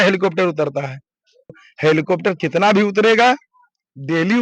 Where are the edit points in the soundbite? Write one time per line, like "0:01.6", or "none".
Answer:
0:01.6